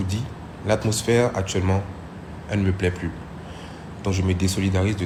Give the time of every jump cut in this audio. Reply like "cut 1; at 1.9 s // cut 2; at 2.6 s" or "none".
none